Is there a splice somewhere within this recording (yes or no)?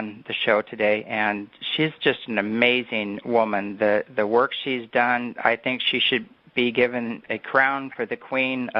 no